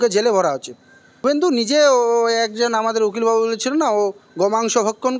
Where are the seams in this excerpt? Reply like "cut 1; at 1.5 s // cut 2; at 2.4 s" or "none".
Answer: cut 1; at 1.4 s